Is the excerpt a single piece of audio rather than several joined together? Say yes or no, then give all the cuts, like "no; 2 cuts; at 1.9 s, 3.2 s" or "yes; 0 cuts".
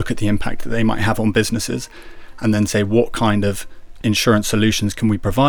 no; 1 cut; at 3.9 s